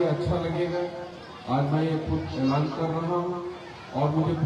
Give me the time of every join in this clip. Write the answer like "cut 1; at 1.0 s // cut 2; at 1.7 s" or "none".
none